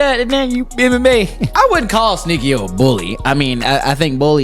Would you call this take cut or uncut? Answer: cut